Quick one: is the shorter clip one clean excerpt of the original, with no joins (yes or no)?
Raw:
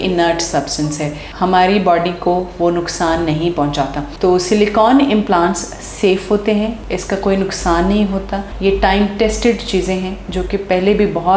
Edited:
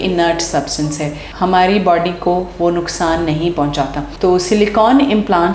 yes